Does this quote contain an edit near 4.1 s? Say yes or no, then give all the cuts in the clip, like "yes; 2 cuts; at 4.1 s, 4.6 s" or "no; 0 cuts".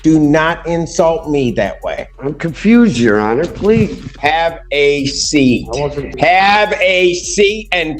yes; 3 cuts; at 2.1 s, 4.1 s, 6.1 s